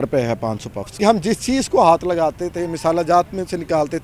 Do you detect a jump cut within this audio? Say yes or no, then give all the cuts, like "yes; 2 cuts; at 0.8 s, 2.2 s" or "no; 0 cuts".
yes; 1 cut; at 0.9 s